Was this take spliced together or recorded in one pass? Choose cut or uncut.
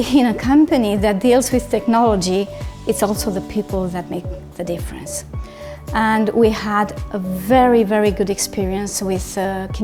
uncut